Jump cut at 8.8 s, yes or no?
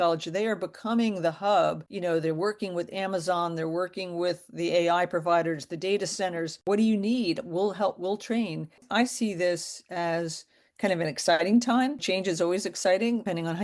yes